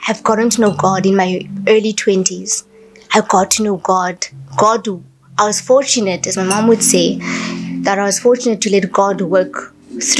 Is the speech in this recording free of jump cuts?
yes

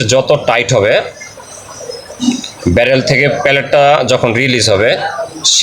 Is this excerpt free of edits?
yes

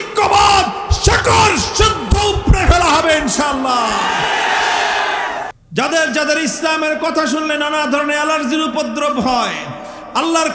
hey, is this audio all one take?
no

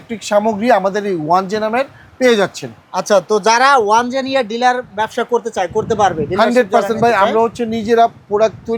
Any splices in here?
no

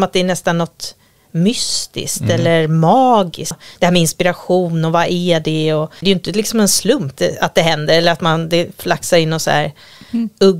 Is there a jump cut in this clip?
yes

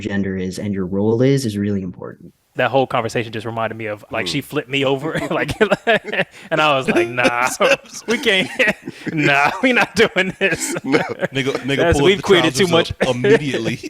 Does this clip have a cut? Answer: yes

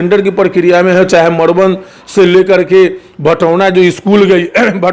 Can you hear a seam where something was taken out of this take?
no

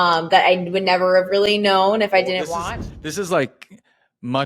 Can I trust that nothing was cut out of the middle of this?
no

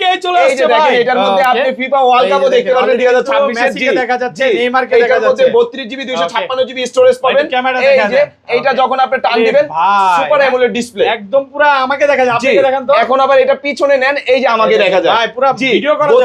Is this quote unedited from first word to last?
yes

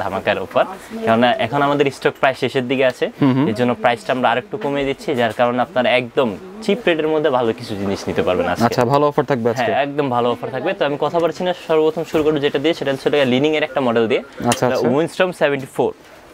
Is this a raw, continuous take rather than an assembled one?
yes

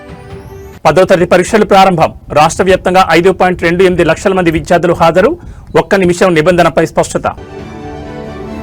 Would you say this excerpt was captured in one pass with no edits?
yes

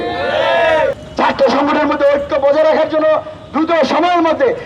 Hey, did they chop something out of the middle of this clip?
yes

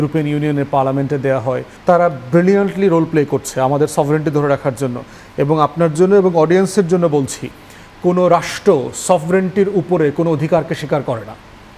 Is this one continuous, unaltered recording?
no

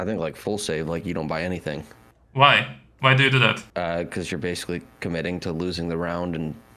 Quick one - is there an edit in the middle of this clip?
yes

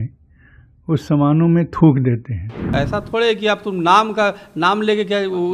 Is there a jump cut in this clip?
yes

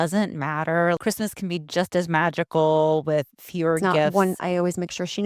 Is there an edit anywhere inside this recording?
yes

